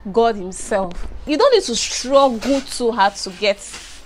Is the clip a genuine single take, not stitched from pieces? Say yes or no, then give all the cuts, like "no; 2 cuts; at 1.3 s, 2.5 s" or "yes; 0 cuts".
no; 1 cut; at 1.3 s